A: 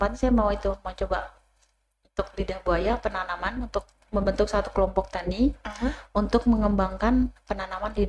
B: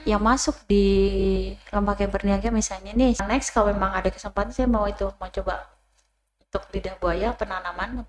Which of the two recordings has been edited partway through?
B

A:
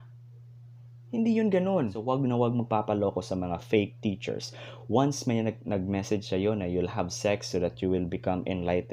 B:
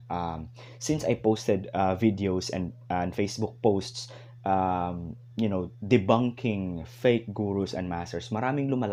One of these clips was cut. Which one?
A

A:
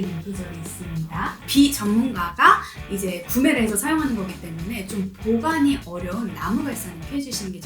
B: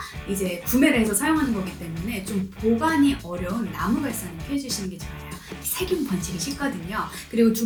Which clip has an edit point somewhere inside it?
A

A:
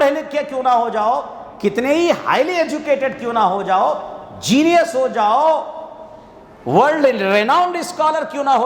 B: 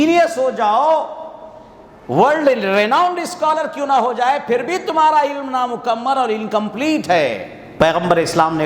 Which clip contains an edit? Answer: B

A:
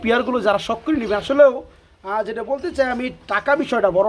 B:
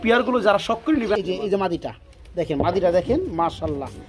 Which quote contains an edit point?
B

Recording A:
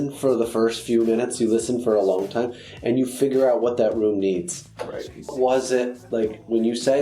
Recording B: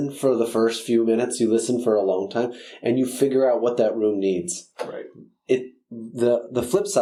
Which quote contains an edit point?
A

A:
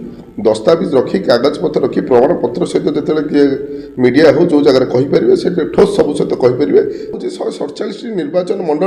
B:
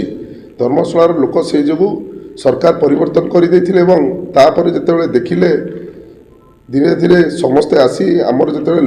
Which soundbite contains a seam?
A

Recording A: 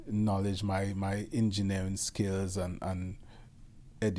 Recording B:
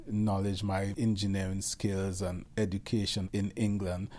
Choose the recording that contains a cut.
B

